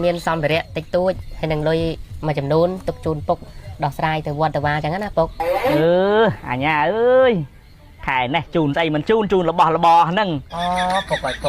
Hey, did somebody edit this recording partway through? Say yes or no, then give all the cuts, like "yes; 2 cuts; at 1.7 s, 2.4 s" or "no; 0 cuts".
yes; 1 cut; at 10.5 s